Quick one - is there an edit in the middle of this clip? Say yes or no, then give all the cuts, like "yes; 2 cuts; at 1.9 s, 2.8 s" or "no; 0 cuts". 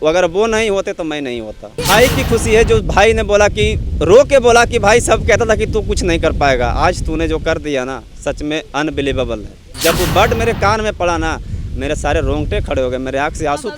yes; 2 cuts; at 1.7 s, 9.6 s